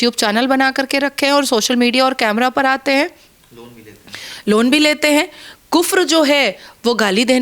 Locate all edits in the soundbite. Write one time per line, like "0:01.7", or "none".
none